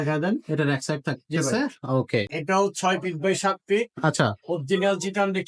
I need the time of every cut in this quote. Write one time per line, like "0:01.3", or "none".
0:02.3